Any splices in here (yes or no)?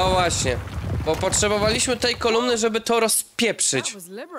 no